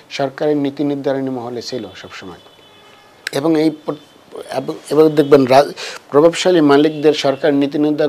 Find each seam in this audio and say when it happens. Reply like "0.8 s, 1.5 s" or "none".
none

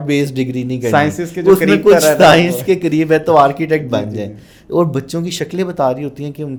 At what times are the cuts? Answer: none

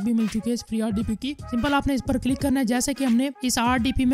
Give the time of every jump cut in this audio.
1.4 s

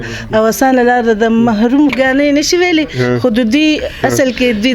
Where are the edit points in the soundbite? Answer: 1.9 s

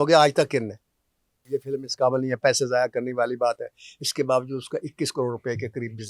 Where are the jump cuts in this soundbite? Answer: 1.4 s

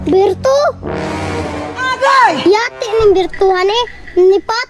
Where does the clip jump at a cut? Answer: none

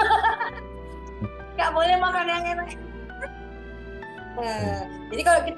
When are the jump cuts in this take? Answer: none

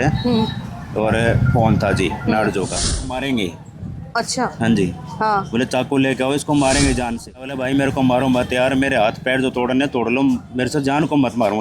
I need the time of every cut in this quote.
3.0 s, 7.5 s

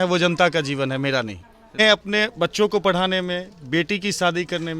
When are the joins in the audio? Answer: 1.8 s

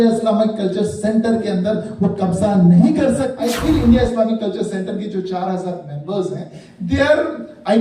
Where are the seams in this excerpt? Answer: 3.3 s

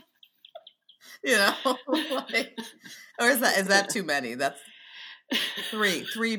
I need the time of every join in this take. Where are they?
none

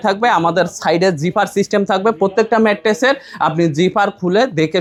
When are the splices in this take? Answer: none

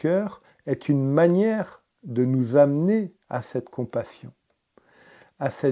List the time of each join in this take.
none

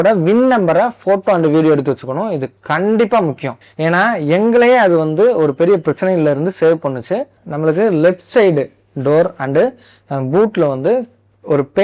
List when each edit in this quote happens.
3.6 s, 7.4 s

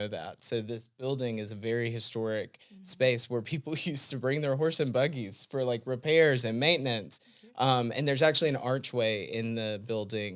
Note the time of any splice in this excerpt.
none

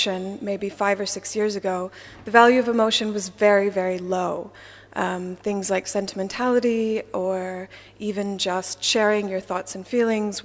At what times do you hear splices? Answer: 1.4 s

